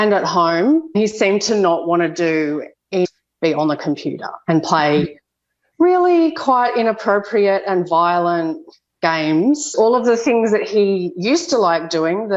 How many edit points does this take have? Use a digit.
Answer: 3